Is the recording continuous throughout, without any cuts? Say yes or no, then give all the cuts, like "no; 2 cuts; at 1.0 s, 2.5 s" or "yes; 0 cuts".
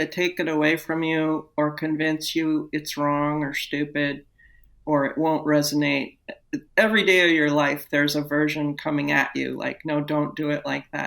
no; 1 cut; at 4.8 s